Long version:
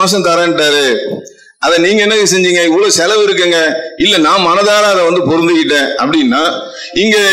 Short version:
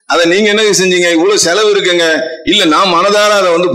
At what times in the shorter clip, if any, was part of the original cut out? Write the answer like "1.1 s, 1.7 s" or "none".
none